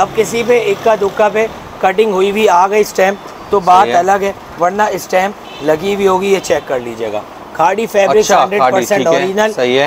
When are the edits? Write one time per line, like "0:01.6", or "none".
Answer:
none